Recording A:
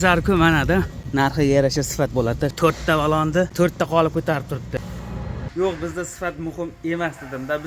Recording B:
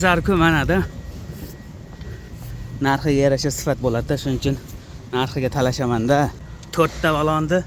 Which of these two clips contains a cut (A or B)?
A